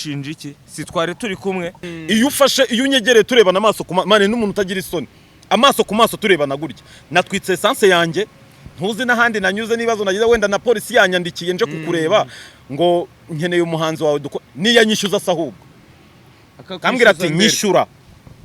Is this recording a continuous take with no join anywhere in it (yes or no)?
no